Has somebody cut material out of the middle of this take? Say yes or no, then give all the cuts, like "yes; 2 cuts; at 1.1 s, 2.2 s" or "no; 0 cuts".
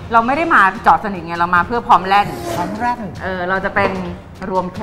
yes; 1 cut; at 2.4 s